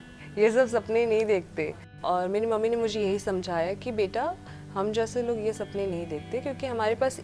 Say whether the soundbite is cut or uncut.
cut